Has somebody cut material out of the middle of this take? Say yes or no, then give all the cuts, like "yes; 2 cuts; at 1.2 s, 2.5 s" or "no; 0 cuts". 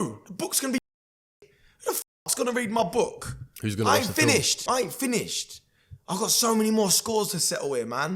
yes; 1 cut; at 4.5 s